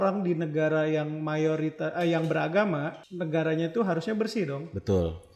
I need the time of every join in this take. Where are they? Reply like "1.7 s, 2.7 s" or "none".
none